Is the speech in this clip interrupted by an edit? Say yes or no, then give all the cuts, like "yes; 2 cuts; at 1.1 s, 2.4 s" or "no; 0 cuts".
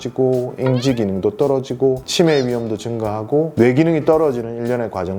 no; 0 cuts